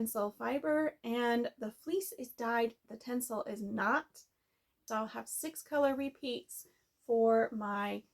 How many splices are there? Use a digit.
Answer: 1